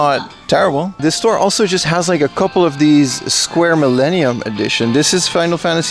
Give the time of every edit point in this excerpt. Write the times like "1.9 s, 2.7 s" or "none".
0.9 s